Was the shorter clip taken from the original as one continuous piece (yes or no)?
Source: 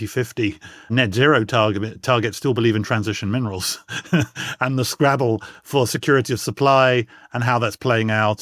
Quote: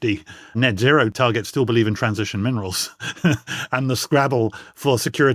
no